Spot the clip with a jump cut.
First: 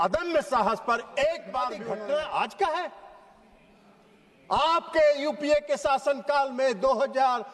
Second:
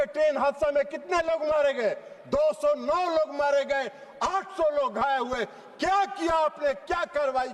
first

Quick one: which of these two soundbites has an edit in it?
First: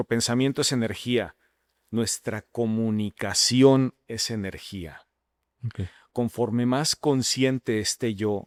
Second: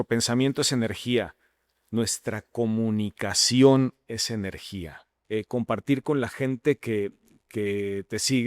second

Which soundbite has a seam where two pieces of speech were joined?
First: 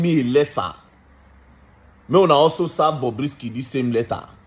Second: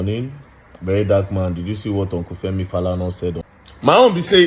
second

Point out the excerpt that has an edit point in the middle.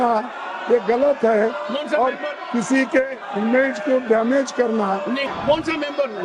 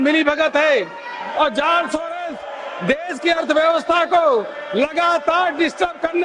first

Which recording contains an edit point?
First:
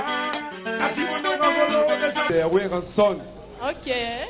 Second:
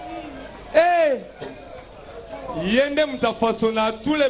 first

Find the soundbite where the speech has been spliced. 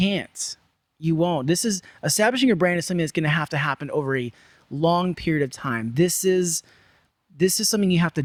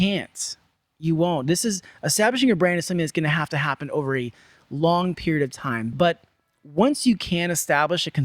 second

